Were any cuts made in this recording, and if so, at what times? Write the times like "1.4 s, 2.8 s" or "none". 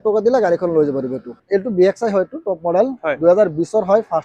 1.3 s